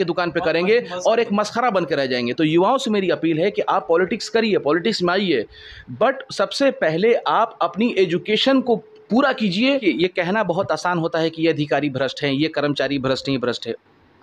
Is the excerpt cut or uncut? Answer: cut